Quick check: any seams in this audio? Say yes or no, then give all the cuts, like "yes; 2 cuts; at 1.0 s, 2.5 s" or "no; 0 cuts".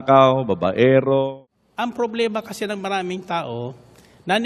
yes; 1 cut; at 1.3 s